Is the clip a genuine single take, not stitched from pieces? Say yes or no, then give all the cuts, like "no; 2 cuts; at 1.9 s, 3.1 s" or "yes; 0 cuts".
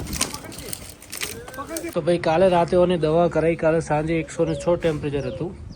no; 1 cut; at 1.9 s